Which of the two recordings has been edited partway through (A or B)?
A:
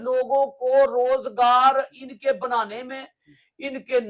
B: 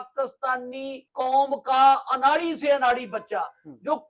B